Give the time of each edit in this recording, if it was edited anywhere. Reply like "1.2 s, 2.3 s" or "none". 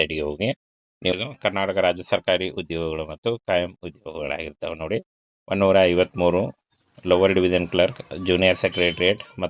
1.1 s